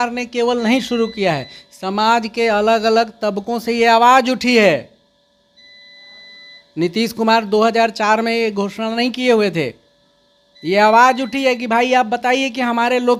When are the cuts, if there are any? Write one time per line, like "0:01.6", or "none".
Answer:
none